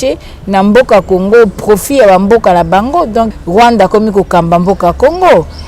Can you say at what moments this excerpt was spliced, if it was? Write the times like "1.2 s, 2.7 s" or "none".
3.3 s